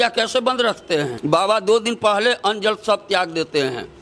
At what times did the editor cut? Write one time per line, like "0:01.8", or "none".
0:01.2